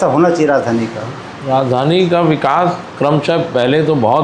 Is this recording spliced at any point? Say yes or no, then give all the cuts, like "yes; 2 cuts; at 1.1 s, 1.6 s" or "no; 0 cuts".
no; 0 cuts